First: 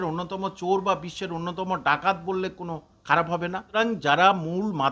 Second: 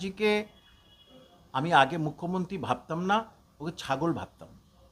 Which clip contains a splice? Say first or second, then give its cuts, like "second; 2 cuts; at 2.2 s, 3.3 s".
first; 1 cut; at 3.7 s